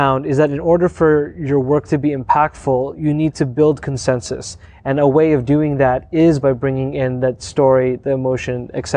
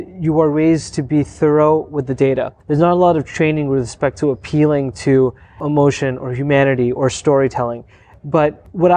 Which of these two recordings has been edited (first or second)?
second